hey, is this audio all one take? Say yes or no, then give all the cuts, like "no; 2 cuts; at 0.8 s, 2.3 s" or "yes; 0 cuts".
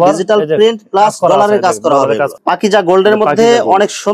no; 1 cut; at 2.3 s